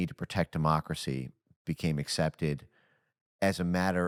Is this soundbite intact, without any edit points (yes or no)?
yes